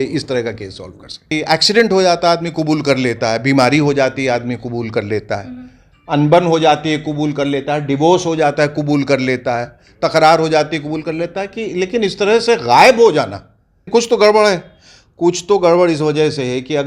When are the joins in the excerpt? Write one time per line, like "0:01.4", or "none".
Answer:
0:01.3
0:13.8